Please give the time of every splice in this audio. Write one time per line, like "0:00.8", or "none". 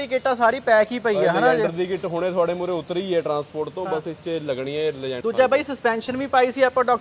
0:05.2